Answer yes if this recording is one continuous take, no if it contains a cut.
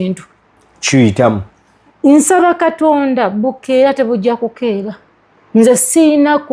yes